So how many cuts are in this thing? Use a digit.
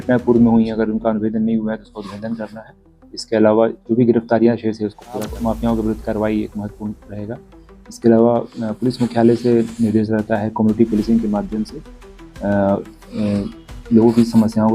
1